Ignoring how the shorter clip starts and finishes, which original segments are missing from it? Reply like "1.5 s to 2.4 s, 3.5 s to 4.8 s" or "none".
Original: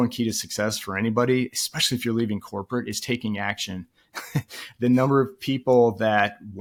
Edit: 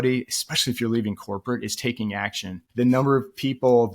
3.8 s to 4.6 s